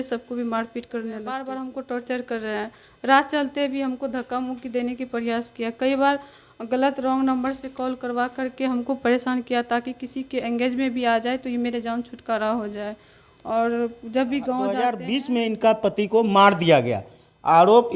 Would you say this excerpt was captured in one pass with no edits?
no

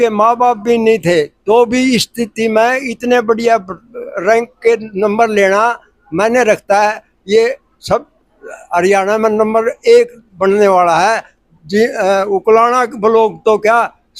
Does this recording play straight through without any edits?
yes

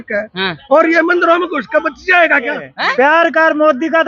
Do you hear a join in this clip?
yes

